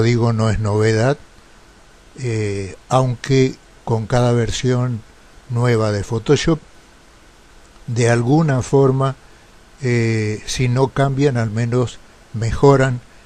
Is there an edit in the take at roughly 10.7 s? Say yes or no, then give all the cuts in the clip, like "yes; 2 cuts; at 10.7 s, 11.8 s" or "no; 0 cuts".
yes; 1 cut; at 10.7 s